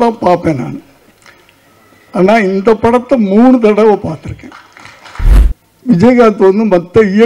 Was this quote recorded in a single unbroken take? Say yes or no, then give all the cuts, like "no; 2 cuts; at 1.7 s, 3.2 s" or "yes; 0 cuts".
no; 1 cut; at 5.3 s